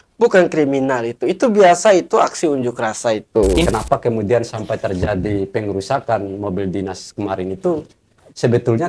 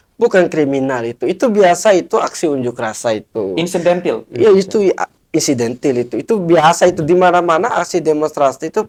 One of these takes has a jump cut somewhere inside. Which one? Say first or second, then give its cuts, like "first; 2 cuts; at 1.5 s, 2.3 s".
first; 1 cut; at 3.7 s